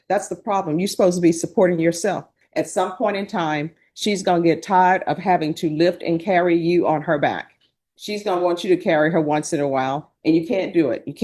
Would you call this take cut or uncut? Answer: cut